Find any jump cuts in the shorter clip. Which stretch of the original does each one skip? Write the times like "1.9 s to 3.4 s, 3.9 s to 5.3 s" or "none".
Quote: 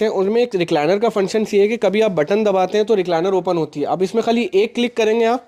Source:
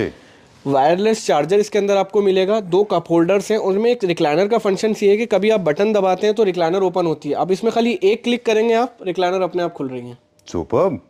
none